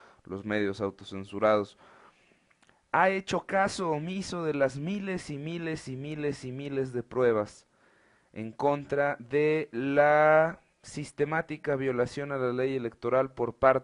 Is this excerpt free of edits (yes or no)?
no